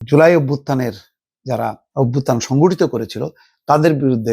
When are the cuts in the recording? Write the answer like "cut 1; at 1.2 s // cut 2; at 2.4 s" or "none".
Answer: cut 1; at 1.8 s